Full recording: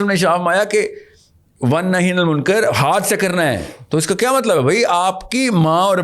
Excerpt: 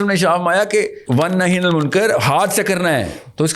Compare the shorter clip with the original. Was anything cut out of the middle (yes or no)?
yes